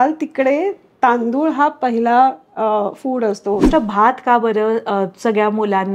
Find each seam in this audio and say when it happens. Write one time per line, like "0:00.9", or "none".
0:03.7